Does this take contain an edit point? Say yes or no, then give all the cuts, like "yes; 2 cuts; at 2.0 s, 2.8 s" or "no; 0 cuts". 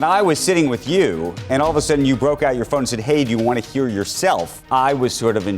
yes; 2 cuts; at 1.3 s, 4.5 s